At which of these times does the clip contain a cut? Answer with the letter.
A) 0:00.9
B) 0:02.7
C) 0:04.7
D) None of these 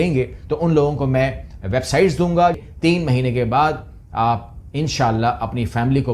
B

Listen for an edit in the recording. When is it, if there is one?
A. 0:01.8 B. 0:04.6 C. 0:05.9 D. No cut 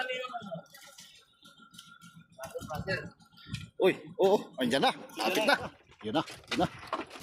C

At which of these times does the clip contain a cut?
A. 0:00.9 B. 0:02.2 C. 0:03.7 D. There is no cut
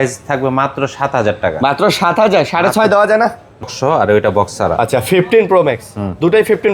C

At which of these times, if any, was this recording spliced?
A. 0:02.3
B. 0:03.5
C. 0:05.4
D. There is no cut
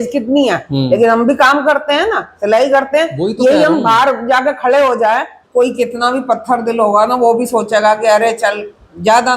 C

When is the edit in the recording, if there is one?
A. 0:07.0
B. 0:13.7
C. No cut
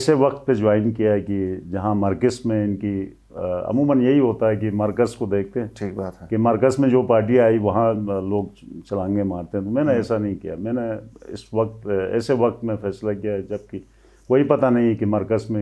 C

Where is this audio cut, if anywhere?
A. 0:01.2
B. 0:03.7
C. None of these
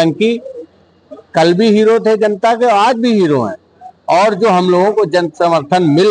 C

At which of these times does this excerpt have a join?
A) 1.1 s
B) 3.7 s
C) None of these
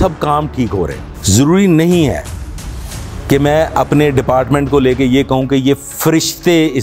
A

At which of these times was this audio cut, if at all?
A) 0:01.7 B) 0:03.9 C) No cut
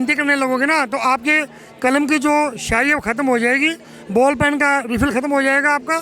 C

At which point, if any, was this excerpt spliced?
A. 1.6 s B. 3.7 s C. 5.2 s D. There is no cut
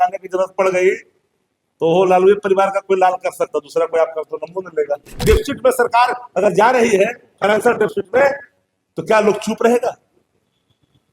C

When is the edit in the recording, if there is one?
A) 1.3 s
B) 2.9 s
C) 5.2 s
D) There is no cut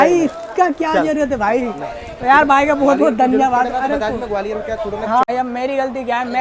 C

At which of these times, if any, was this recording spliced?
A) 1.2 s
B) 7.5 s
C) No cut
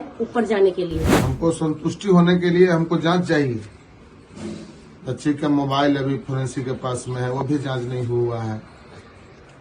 A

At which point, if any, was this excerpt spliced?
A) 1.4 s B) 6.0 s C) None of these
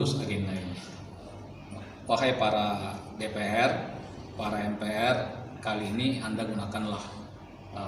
A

